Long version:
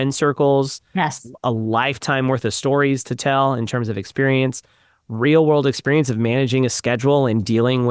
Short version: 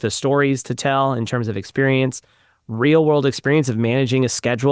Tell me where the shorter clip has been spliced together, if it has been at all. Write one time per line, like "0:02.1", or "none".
none